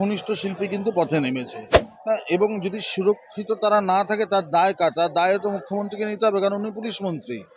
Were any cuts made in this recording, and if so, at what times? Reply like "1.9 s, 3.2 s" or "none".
1.6 s